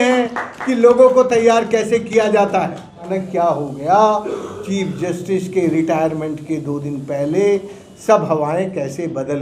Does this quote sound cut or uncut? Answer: cut